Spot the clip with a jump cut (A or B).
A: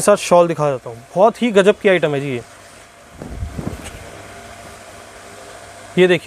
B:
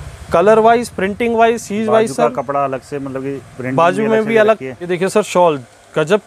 B